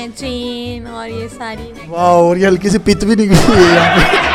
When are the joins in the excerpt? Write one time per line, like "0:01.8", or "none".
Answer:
none